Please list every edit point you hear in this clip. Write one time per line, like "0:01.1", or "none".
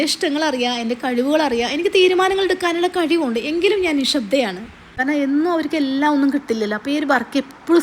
0:04.9